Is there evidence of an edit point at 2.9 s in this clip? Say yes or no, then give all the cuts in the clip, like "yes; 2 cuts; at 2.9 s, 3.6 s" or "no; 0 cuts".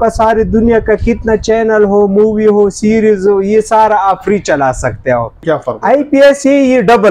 no; 1 cut; at 5.4 s